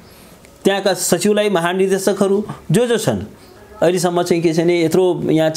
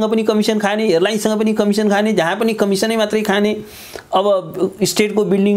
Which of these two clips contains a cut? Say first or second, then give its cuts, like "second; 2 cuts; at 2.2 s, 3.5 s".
first; 1 cut; at 3.4 s